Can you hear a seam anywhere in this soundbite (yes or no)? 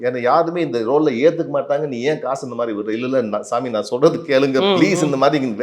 no